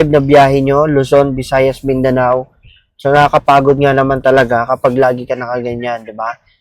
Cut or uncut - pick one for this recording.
uncut